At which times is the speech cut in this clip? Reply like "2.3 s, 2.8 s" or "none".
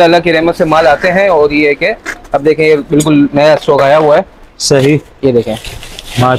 none